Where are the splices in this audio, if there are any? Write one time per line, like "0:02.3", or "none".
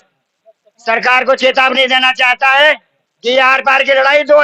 none